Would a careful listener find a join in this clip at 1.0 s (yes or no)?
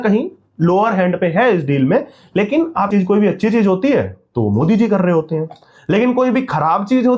no